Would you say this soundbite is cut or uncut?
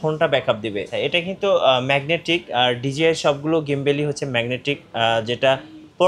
cut